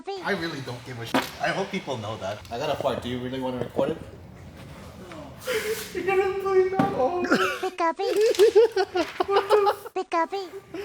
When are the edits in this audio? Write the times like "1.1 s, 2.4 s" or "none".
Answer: 2.4 s, 4.9 s